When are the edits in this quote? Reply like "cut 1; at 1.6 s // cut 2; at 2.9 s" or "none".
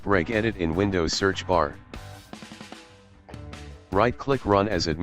cut 1; at 1.8 s // cut 2; at 3.9 s